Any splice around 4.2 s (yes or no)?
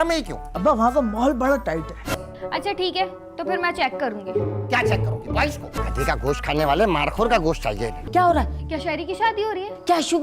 no